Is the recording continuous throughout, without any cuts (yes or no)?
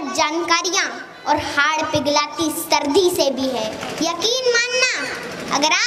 no